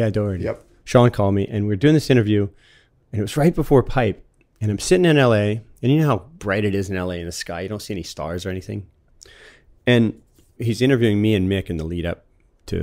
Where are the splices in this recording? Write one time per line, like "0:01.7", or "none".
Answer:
0:06.4
0:10.6